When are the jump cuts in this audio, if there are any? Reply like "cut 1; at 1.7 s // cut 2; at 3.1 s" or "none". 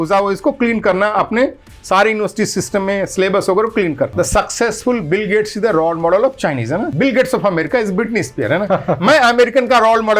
cut 1; at 4.1 s // cut 2; at 6.9 s

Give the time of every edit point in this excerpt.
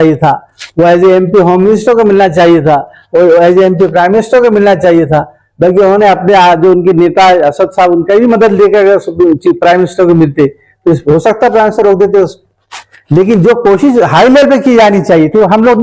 none

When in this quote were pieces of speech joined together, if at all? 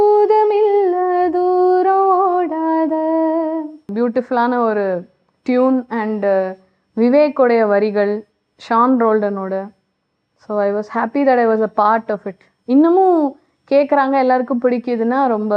cut 1; at 3.9 s

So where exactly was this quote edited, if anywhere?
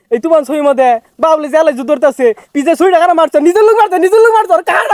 none

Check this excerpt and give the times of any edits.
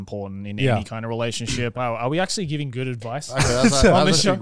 cut 1; at 1.7 s

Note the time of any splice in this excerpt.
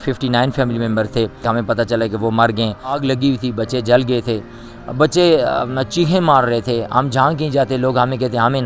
cut 1; at 1.4 s // cut 2; at 3.0 s

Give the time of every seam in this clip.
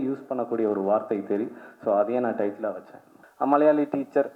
cut 1; at 3.2 s

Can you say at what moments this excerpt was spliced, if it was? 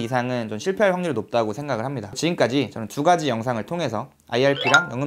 cut 1; at 1.9 s

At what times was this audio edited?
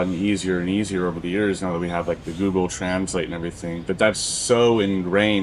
none

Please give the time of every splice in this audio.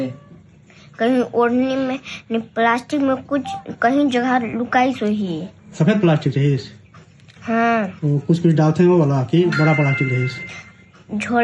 none

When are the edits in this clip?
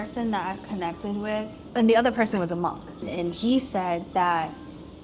cut 1; at 1.7 s // cut 2; at 3.0 s

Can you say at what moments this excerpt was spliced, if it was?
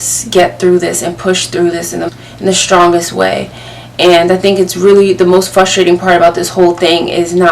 cut 1; at 2.1 s

